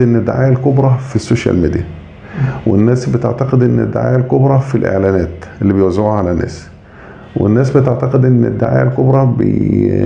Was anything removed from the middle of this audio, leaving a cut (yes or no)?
no